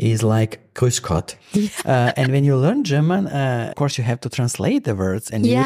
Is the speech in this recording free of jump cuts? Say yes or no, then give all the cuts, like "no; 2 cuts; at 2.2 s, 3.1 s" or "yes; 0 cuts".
no; 1 cut; at 3.6 s